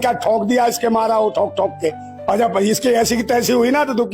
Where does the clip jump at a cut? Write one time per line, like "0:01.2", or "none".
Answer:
0:02.1